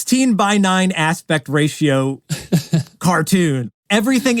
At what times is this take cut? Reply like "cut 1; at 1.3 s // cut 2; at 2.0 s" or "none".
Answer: none